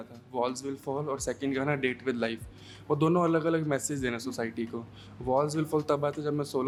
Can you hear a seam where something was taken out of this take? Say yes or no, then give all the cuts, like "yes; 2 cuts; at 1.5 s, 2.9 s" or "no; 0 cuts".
no; 0 cuts